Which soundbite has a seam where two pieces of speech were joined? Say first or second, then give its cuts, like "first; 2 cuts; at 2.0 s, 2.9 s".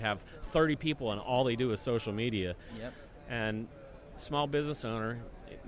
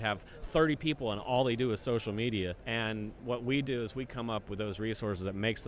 second; 1 cut; at 2.6 s